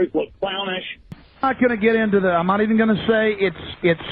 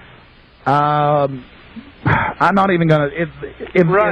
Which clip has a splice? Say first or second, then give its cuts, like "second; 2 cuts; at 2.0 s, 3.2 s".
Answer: first; 1 cut; at 1.1 s